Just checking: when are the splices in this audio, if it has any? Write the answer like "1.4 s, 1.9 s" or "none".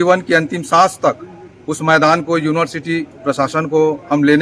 none

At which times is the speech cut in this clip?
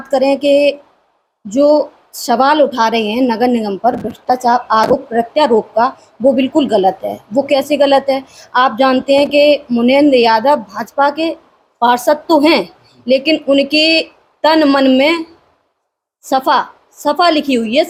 none

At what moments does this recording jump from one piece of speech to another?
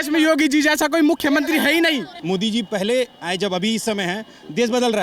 2.1 s

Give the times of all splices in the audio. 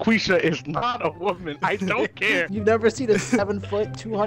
2.5 s

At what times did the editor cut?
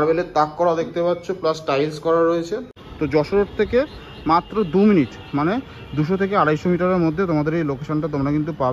2.8 s

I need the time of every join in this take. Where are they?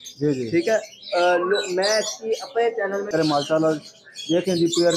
3.1 s

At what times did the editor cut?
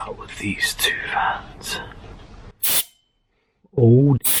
none

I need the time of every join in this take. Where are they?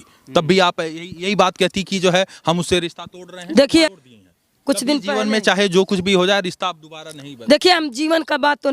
3.9 s

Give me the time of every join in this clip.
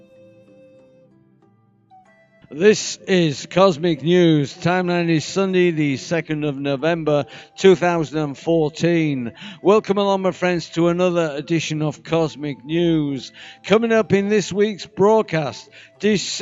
none

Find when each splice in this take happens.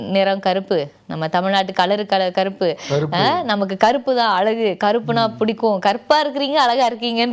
none

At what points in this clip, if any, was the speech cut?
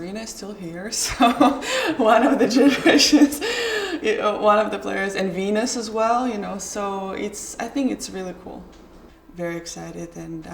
9.1 s

